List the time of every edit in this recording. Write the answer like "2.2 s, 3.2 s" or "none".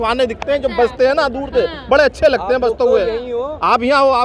none